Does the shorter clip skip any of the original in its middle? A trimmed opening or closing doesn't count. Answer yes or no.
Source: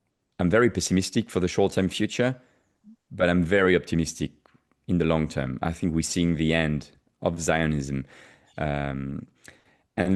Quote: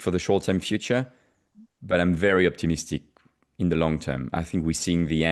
no